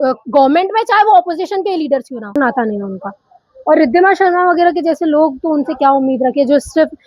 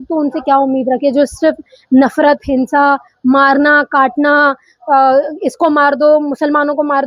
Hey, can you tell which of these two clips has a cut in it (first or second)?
first